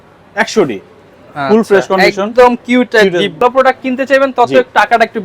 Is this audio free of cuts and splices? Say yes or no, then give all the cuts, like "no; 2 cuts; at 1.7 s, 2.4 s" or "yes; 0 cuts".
no; 1 cut; at 3.4 s